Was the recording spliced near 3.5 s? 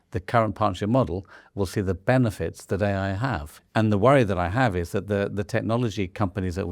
yes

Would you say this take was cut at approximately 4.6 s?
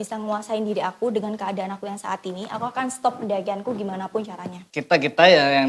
yes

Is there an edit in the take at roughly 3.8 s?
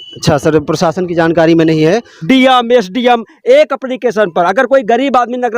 yes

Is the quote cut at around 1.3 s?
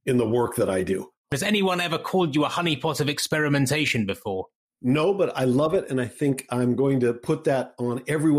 yes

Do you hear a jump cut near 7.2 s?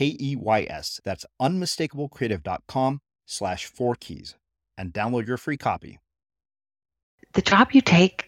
yes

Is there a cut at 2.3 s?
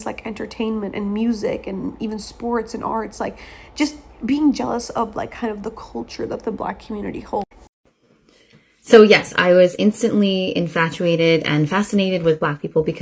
no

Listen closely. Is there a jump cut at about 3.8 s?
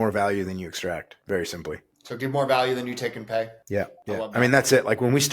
yes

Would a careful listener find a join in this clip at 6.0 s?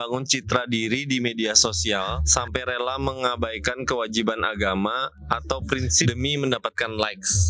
yes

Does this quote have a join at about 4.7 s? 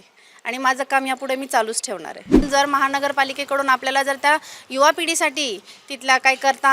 no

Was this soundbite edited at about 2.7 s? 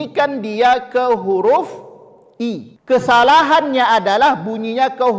yes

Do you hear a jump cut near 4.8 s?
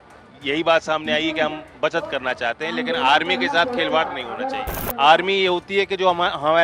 yes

